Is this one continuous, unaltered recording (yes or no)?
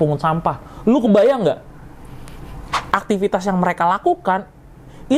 no